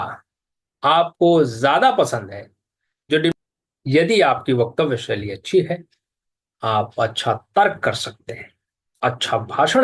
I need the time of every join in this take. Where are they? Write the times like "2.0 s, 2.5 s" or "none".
3.3 s